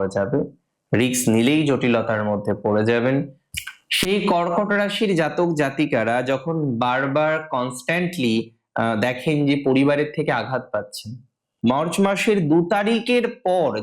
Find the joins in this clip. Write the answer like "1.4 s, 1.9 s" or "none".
3.4 s, 11.5 s